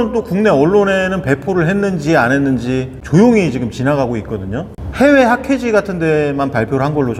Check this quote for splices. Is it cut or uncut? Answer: uncut